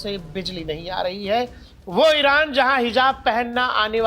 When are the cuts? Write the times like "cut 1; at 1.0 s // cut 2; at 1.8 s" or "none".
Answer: cut 1; at 1.8 s